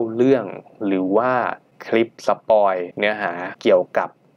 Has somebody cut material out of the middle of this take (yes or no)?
yes